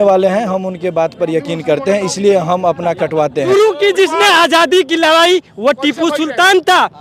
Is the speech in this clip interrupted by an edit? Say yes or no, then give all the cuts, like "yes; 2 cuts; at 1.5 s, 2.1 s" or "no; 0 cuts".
yes; 1 cut; at 3.5 s